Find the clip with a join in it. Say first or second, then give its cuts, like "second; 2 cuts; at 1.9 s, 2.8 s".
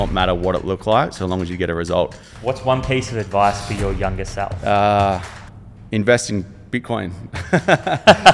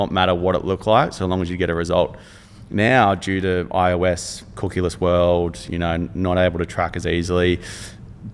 first; 2 cuts; at 2.3 s, 4.5 s